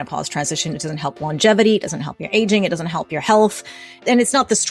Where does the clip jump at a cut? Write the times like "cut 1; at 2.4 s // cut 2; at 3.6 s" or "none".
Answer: none